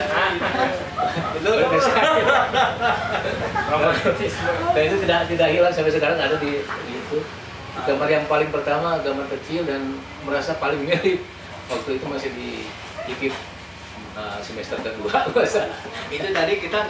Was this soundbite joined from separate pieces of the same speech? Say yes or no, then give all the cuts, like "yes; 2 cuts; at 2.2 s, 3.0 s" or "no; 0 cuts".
no; 0 cuts